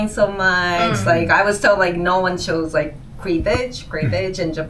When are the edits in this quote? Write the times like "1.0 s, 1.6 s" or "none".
none